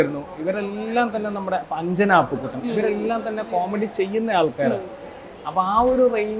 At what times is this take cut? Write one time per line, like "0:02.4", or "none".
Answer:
none